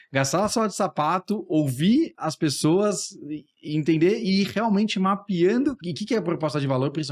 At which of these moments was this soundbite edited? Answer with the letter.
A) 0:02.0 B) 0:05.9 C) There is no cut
B